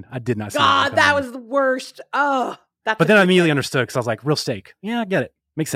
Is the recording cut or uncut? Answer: uncut